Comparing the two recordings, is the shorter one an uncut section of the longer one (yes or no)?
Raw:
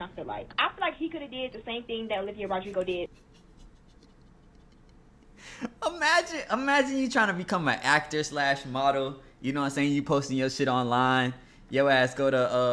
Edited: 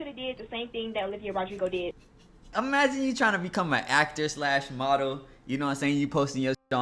no